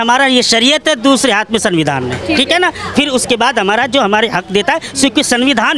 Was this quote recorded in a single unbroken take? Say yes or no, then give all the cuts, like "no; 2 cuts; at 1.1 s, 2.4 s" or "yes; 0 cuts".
yes; 0 cuts